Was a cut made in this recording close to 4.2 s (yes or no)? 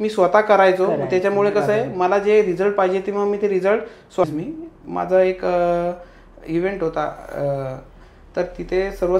yes